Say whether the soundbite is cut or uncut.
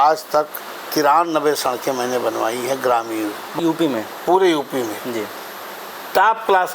cut